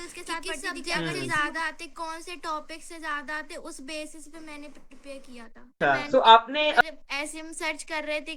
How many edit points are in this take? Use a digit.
1